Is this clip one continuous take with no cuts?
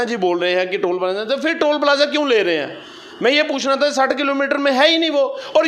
yes; 0 cuts

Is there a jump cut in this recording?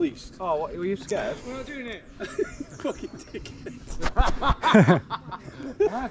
no; 0 cuts

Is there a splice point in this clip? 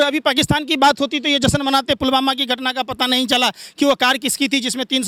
no; 0 cuts

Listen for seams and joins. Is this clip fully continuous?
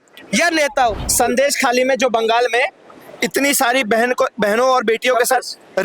no; 1 cut; at 1.0 s

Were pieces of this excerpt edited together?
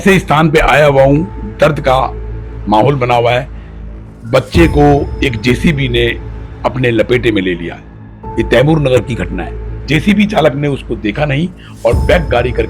yes; 1 cut; at 9.6 s

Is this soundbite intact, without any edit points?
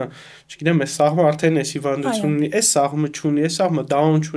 yes; 0 cuts

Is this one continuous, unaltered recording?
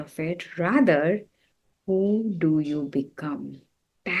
yes; 0 cuts

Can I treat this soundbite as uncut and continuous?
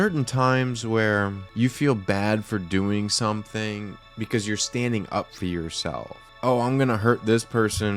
no; 3 cuts; at 1.4 s, 4.0 s, 6.2 s

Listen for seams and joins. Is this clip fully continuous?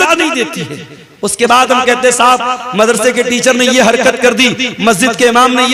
yes; 0 cuts

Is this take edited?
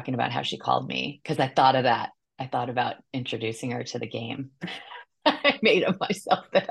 no; 0 cuts

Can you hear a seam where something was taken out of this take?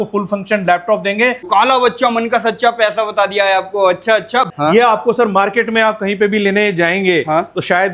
yes; 2 cuts; at 1.4 s, 4.5 s

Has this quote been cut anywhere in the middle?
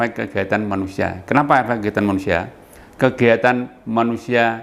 no; 0 cuts

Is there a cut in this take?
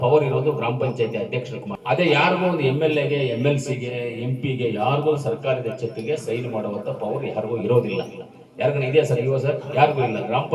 yes; 1 cut; at 1.7 s

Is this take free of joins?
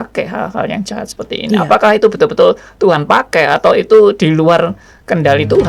yes; 0 cuts

